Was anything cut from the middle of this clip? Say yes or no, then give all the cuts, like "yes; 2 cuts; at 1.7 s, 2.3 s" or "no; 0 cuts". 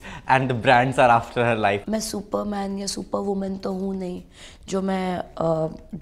yes; 1 cut; at 1.8 s